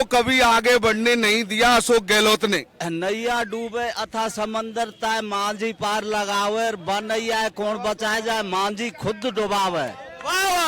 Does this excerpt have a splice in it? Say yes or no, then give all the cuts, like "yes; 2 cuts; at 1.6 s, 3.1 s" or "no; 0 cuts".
yes; 1 cut; at 2.7 s